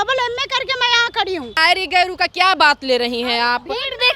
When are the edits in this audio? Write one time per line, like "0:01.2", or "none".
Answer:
0:01.5